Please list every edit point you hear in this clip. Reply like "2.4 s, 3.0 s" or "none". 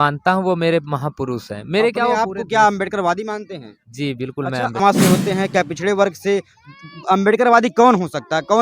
4.8 s